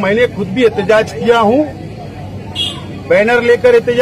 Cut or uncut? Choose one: uncut